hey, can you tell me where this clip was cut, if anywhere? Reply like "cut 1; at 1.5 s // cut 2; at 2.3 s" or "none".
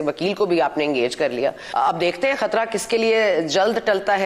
cut 1; at 1.6 s

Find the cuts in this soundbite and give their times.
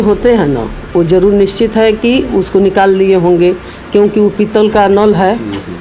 none

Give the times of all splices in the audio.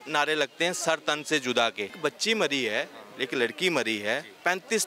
cut 1; at 2.0 s

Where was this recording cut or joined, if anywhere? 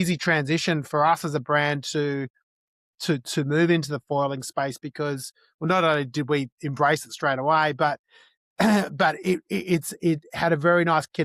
none

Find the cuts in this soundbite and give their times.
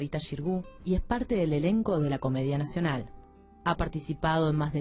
none

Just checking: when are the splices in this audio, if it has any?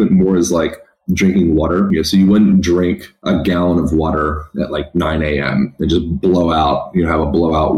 cut 1; at 1.9 s // cut 2; at 3.1 s

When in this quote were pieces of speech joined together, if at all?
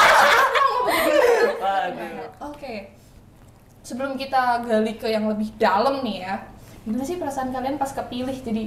cut 1; at 2.0 s

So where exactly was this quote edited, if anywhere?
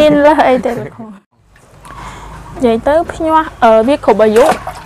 cut 1; at 1.5 s

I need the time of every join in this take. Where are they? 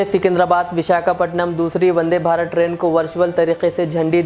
none

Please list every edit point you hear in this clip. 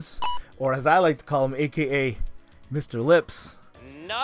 none

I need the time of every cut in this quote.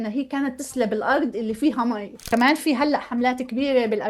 cut 1; at 2.3 s

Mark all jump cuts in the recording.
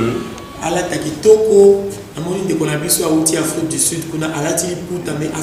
none

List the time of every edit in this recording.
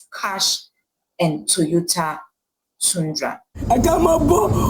cut 1; at 3.5 s

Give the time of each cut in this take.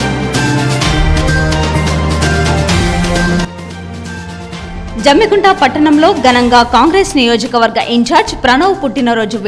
cut 1; at 4.6 s

